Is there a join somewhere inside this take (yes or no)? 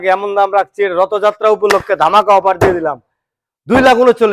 no